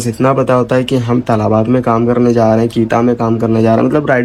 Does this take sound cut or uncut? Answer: uncut